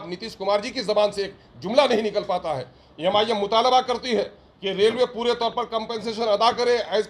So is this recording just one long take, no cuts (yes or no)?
yes